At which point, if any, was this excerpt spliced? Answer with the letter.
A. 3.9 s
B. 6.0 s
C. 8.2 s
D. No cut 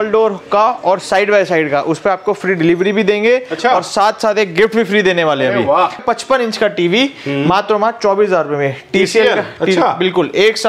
B